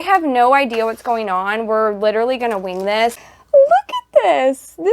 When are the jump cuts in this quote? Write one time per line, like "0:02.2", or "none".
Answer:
0:03.3